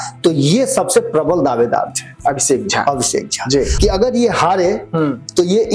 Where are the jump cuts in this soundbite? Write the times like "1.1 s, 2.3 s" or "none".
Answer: 3.7 s